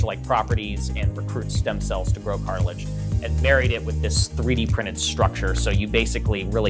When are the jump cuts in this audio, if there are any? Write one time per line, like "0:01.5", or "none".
none